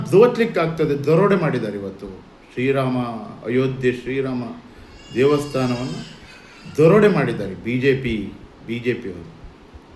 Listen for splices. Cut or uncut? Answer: uncut